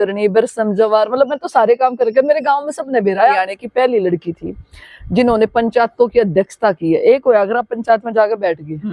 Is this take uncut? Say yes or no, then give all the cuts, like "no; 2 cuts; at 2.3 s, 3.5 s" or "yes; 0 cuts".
no; 1 cut; at 3.3 s